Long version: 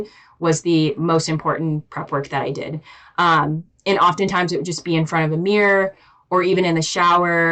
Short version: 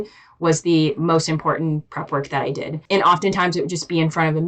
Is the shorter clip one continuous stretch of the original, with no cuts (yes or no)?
no